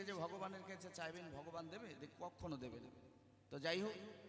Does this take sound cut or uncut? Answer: uncut